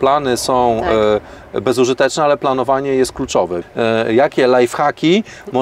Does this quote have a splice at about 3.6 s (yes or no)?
yes